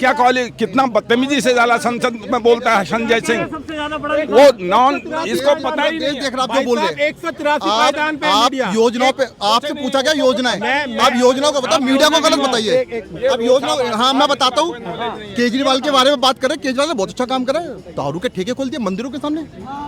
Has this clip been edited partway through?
no; 0 cuts

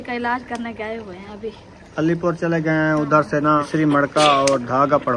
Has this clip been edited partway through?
yes; 1 cut; at 3.7 s

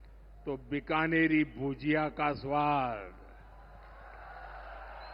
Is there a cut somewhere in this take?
no; 0 cuts

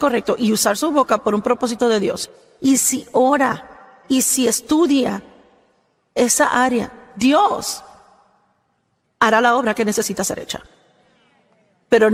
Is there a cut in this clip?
no; 0 cuts

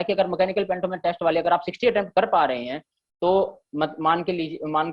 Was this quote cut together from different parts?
no; 0 cuts

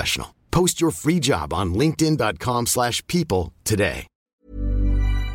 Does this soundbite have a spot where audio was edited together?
yes; 1 cut; at 4.3 s

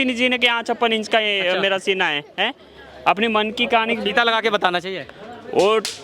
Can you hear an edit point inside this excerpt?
no; 0 cuts

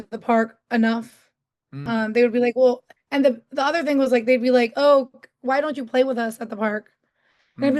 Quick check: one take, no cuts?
yes; 0 cuts

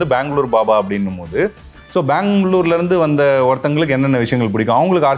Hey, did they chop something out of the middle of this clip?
no; 0 cuts

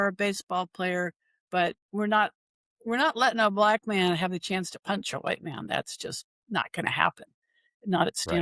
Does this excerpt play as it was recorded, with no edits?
yes; 0 cuts

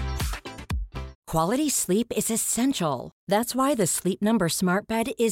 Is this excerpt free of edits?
no; 1 cut; at 1.1 s

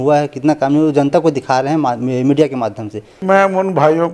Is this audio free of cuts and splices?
no; 1 cut; at 3.2 s

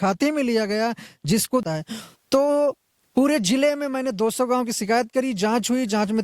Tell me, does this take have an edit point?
yes; 1 cut; at 1.6 s

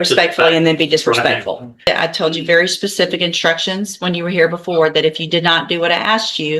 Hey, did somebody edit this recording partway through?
yes; 1 cut; at 1.9 s

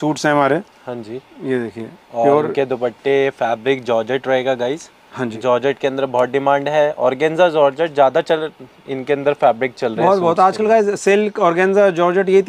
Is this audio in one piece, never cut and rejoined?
yes; 0 cuts

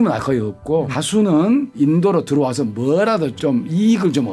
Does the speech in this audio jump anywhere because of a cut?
yes; 3 cuts; at 0.9 s, 1.7 s, 3.3 s

